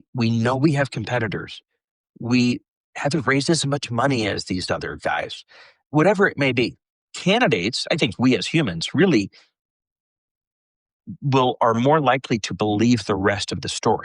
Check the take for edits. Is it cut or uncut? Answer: uncut